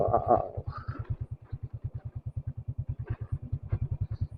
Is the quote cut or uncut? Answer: uncut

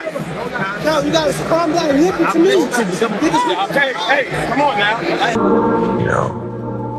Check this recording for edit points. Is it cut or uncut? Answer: cut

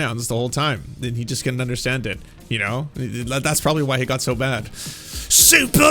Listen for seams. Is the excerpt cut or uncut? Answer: uncut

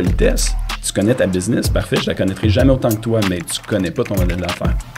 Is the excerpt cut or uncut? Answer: uncut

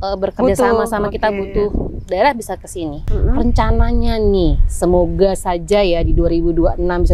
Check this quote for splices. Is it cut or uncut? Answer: cut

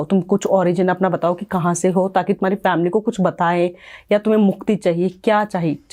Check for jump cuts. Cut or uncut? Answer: uncut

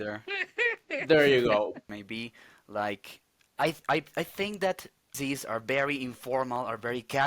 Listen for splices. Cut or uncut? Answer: cut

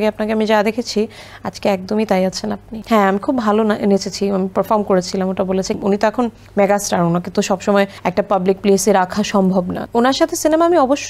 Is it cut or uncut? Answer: cut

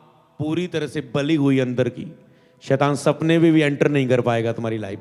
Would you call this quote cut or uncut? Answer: uncut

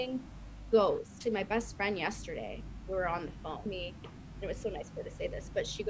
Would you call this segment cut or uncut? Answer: cut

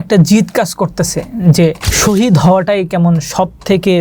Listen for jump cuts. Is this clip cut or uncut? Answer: cut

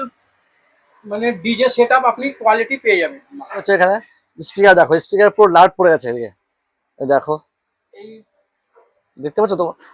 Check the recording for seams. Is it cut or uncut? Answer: cut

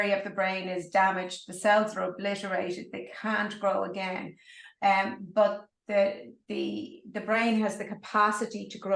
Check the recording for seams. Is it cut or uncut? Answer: uncut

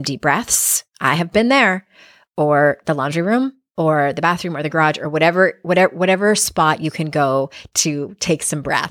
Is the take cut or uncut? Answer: uncut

